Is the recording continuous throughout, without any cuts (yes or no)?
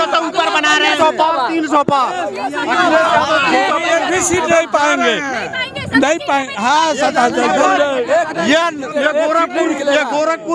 yes